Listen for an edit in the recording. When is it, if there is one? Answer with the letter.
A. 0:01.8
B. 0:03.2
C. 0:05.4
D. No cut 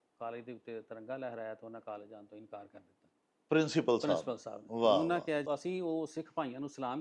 C